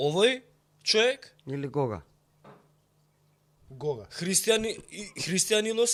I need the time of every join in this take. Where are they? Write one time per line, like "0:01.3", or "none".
none